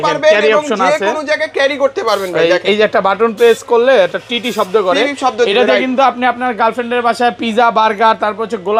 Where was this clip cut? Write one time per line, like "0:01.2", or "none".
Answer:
none